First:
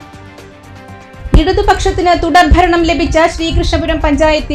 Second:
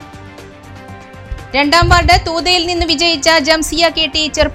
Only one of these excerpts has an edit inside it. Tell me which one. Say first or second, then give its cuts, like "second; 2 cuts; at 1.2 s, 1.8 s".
first; 1 cut; at 0.9 s